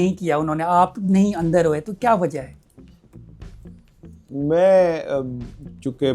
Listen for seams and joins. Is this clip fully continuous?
yes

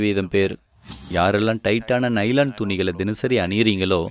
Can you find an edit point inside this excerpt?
yes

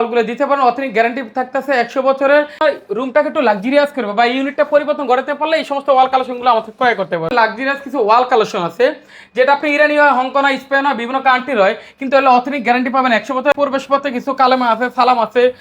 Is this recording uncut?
no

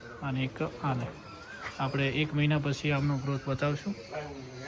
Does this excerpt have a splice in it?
no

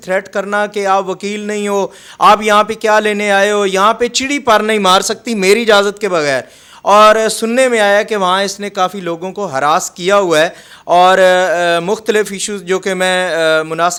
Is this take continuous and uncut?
yes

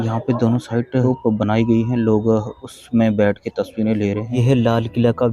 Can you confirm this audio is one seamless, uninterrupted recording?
no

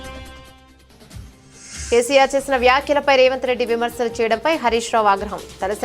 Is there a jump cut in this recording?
yes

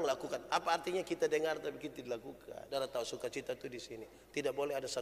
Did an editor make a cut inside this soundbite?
yes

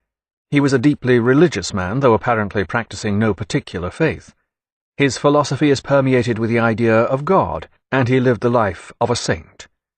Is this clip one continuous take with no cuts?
no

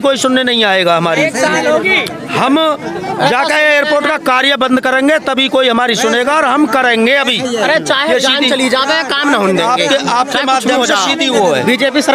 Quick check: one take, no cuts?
yes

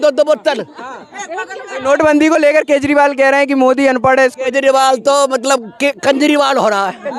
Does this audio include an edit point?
no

